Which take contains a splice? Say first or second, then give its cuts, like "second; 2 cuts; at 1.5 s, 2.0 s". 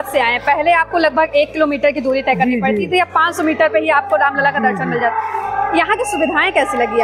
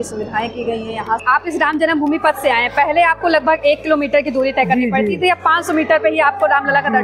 second; 1 cut; at 1.2 s